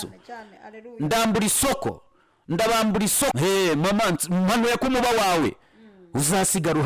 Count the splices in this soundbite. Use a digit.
1